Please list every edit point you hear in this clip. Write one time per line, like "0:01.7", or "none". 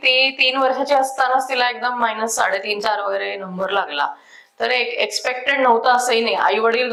none

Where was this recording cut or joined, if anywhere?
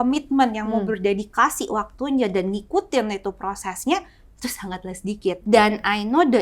0:05.4

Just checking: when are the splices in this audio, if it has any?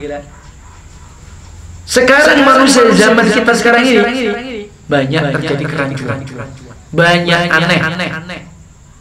none

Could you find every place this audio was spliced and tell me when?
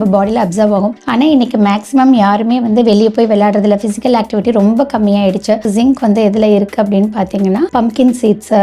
0:01.0
0:05.7
0:07.7

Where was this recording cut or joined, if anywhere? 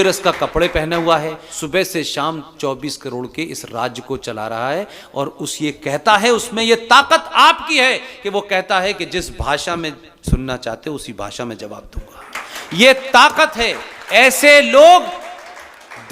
0:01.5

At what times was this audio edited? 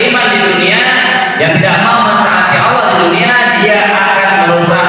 none

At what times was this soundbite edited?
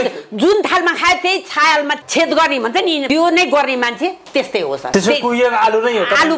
0:02.0
0:03.0
0:04.9

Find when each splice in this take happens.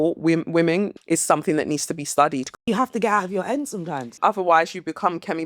0:01.0
0:02.6
0:04.1

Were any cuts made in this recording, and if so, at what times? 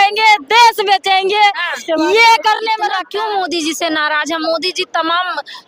0:02.9

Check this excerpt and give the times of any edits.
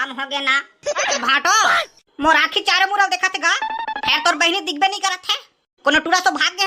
0:01.2

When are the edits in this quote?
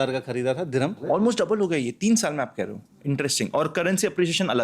0:01.0

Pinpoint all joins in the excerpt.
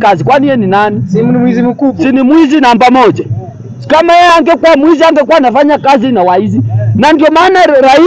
none

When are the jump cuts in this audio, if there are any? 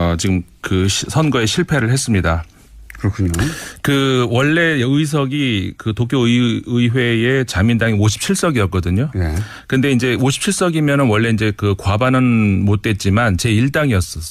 none

